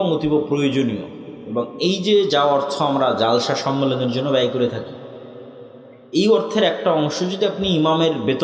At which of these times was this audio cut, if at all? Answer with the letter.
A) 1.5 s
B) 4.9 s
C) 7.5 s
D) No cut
D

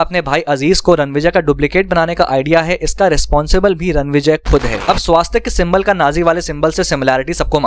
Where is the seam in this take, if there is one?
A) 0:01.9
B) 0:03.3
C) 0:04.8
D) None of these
C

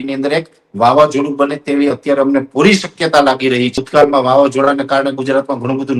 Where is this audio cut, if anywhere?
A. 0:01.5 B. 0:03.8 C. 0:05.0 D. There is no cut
B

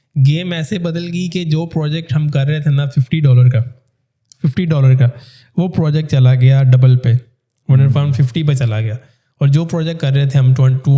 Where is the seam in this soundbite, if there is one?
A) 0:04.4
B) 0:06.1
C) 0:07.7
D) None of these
D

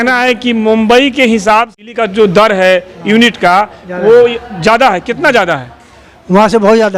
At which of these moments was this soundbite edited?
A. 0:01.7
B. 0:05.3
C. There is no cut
A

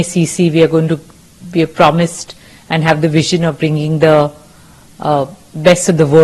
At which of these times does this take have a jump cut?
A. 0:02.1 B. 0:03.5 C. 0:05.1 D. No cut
D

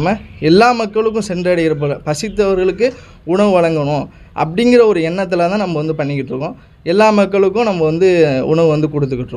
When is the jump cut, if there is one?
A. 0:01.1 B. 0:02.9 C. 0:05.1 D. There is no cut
D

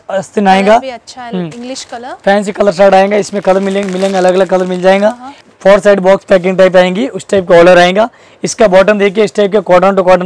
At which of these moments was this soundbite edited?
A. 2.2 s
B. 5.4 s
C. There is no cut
B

